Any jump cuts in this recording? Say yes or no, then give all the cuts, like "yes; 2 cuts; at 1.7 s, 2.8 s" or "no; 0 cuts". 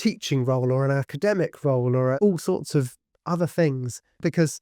yes; 1 cut; at 2.2 s